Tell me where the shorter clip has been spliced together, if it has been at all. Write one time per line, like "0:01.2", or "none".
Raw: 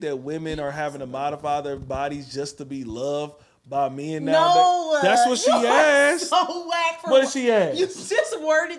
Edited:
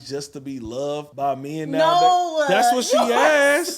0:01.1